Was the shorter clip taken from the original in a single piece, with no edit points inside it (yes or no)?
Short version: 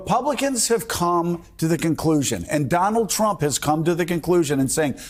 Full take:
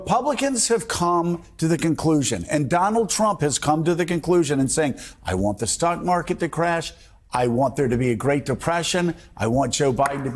yes